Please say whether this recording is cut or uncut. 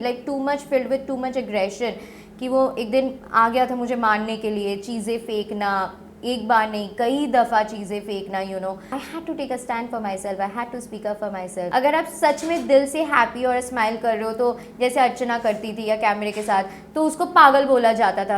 cut